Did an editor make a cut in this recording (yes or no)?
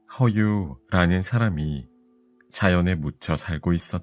no